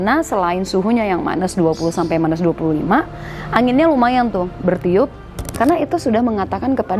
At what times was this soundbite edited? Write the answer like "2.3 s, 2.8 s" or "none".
5.5 s